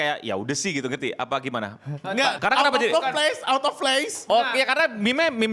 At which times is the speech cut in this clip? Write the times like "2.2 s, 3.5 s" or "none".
none

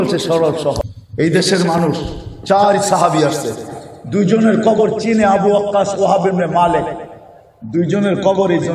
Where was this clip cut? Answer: 1.0 s

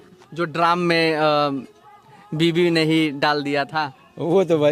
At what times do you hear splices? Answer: none

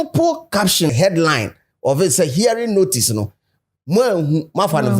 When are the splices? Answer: 0.9 s

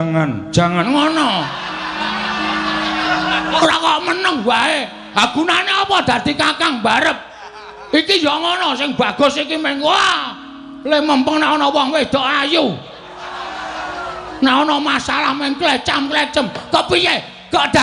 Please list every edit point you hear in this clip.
none

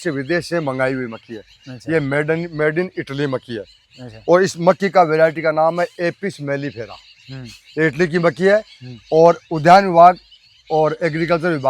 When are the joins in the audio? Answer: none

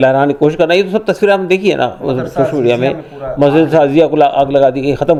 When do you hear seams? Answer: none

